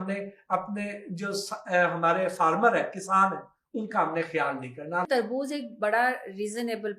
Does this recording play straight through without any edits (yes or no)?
no